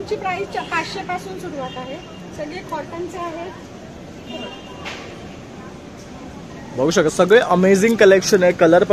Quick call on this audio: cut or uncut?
uncut